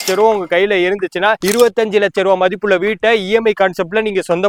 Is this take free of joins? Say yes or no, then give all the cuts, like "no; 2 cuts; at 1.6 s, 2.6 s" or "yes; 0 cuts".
yes; 0 cuts